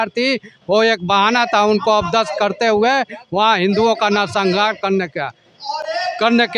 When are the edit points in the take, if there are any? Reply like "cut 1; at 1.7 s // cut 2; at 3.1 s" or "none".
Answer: none